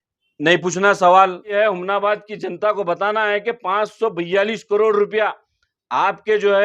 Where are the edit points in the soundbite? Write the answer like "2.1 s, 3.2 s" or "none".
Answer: 1.5 s